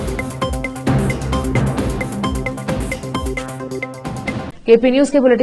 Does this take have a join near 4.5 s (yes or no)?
no